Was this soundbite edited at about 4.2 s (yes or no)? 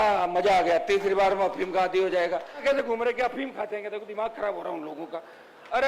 no